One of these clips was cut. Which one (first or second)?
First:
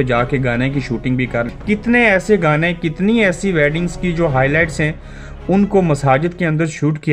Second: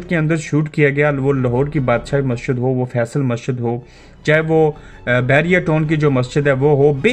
first